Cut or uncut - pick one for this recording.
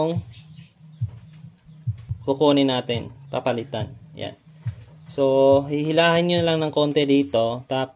cut